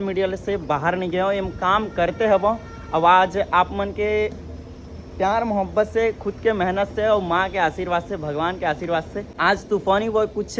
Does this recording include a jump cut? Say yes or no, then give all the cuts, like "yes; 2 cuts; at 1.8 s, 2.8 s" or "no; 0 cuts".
no; 0 cuts